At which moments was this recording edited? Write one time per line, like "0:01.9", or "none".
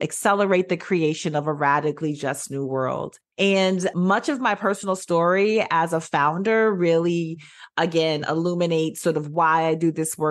0:03.9